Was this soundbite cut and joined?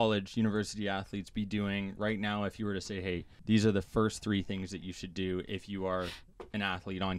yes; 1 cut; at 3.3 s

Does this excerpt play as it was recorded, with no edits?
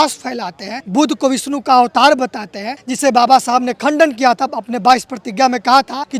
yes; 0 cuts

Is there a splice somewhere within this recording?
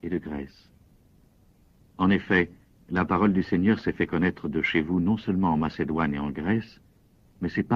no; 0 cuts

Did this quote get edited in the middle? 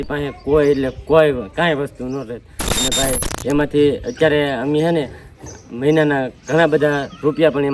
no; 0 cuts

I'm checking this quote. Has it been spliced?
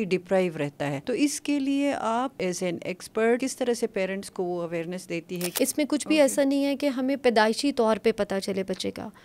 yes; 4 cuts; at 1.0 s, 2.4 s, 3.4 s, 5.4 s

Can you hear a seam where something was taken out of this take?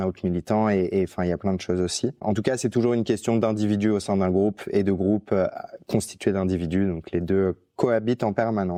no; 0 cuts

